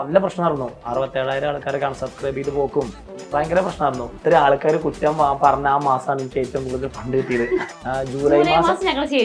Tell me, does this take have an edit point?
yes; 2 cuts; at 4.2 s, 7.8 s

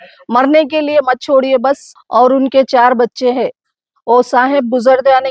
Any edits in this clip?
yes; 1 cut; at 1.9 s

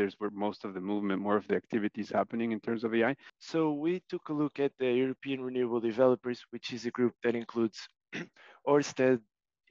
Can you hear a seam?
yes; 1 cut; at 3.3 s

